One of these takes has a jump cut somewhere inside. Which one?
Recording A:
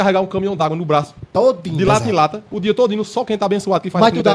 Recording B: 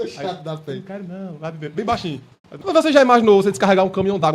B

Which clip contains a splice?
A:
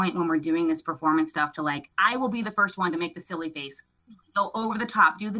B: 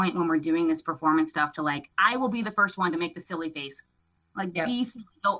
A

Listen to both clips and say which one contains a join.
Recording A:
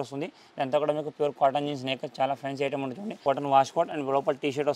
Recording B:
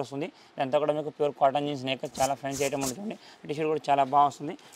A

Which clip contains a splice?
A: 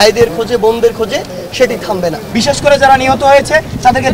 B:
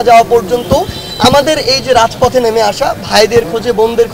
A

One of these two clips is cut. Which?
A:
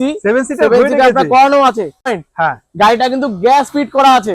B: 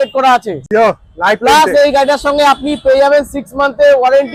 A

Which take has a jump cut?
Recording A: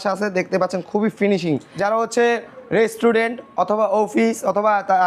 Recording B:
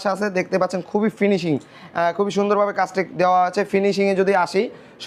A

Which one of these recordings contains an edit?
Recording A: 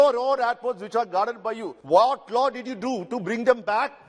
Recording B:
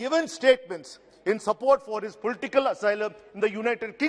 A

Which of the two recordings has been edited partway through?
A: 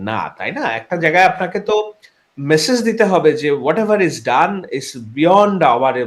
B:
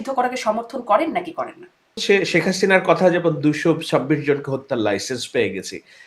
B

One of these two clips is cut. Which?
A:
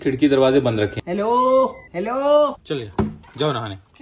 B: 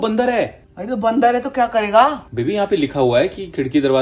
A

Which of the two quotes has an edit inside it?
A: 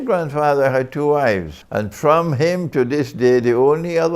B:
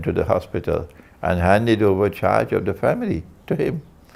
A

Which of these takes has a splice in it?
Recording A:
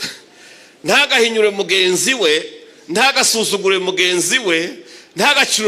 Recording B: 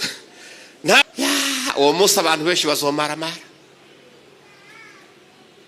B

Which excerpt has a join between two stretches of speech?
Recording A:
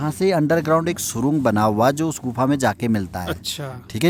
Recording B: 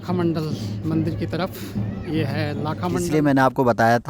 B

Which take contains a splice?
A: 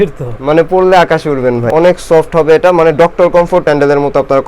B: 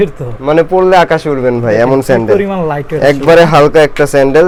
A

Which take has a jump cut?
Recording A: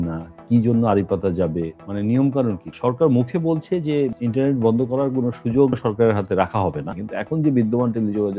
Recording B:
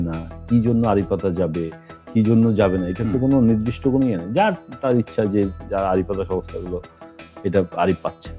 A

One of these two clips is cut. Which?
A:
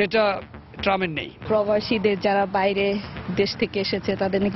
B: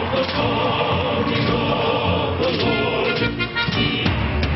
A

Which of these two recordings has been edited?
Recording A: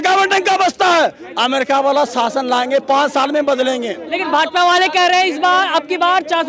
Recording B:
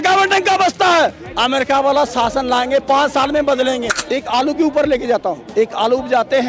B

